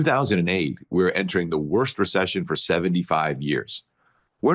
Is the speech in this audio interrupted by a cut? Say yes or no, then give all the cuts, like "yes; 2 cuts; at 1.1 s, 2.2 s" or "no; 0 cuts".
no; 0 cuts